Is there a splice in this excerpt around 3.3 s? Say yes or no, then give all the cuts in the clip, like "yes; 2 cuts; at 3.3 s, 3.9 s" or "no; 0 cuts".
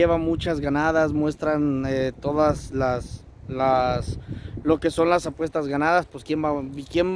no; 0 cuts